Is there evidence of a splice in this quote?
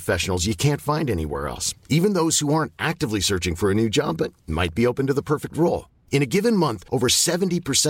no; 0 cuts

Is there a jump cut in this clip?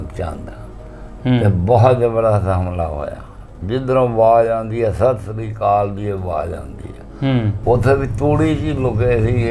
yes; 1 cut; at 7.6 s

